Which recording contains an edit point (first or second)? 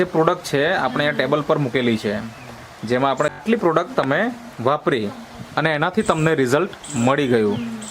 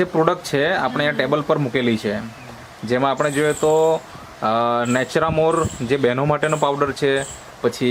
first